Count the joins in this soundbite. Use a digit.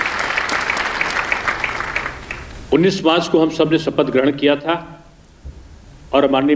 0